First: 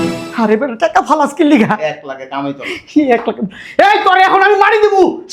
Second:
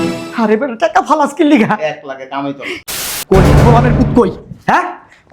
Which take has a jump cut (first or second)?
second